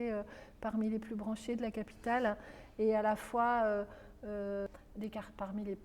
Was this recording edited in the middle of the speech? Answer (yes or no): yes